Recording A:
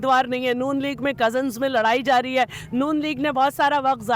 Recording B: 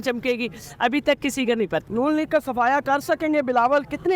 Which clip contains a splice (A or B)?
B